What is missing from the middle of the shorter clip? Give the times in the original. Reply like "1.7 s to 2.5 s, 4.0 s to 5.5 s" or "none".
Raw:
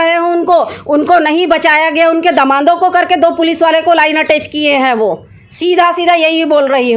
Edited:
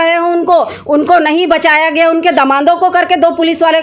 none